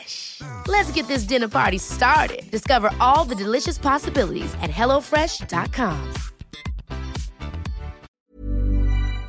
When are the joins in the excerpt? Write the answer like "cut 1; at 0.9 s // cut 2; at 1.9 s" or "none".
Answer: cut 1; at 8.1 s